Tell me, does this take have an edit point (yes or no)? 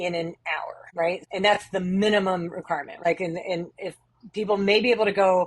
yes